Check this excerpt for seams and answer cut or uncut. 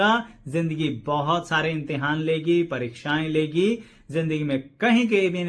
uncut